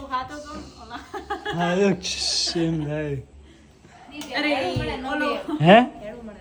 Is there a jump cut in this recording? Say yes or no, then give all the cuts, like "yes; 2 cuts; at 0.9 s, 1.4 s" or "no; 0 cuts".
no; 0 cuts